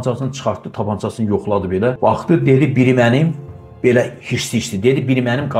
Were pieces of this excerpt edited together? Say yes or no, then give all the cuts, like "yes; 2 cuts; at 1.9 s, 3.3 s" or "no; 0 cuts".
yes; 1 cut; at 2.0 s